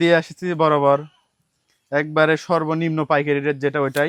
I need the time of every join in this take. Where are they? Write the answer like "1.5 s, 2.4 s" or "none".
none